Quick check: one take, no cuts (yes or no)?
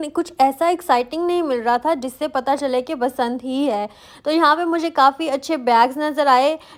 yes